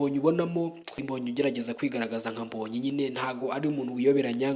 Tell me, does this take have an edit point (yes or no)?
yes